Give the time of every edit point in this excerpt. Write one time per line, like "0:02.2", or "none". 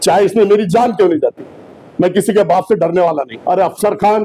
0:03.3